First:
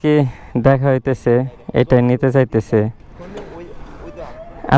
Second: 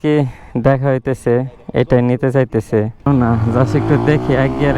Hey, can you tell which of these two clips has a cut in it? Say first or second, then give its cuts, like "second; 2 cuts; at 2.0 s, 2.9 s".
second; 1 cut; at 3.1 s